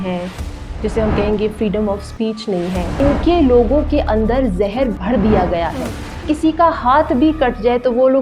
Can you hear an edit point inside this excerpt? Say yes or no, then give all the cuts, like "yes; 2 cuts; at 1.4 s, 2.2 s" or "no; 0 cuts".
yes; 2 cuts; at 3.0 s, 6.2 s